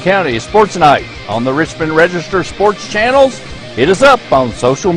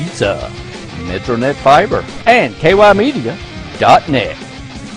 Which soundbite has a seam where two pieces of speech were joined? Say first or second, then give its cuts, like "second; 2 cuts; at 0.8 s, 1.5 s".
second; 1 cut; at 2.1 s